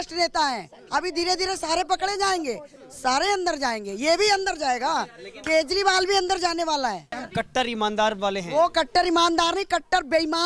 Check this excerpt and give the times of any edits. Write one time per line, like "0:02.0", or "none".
0:07.1

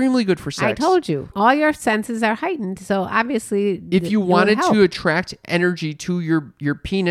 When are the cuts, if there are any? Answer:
0:01.3

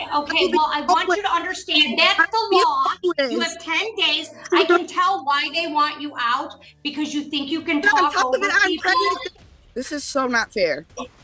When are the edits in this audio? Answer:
0:09.3

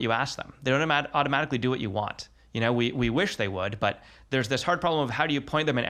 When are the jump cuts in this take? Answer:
none

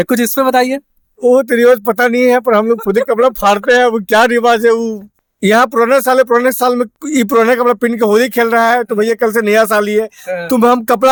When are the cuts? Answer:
none

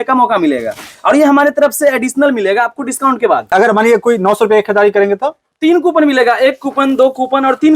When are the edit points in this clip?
0:03.5

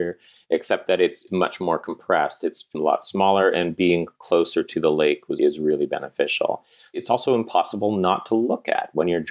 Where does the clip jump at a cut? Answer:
0:07.0

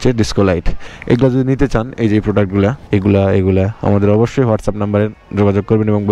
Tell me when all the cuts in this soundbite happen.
none

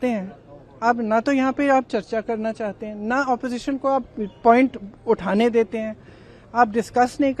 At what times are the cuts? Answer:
none

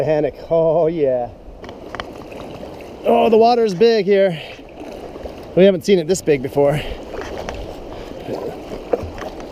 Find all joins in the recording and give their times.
none

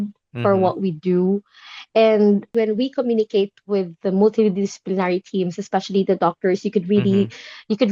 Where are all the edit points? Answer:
none

